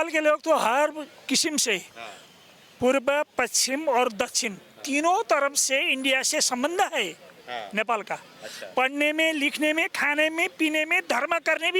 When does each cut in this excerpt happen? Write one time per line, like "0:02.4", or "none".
none